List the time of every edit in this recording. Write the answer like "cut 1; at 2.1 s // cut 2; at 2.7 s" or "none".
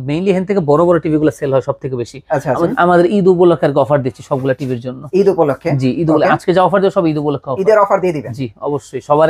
cut 1; at 2.7 s